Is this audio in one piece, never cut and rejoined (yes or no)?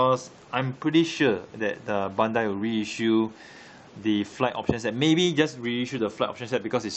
no